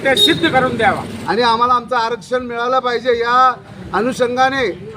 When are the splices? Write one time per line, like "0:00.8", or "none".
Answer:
0:01.1